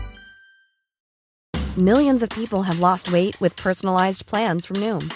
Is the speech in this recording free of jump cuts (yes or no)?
no